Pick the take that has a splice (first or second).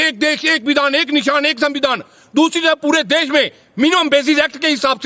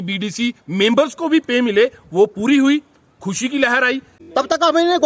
second